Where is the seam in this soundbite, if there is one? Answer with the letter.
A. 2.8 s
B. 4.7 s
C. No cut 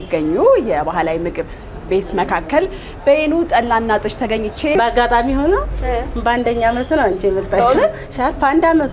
B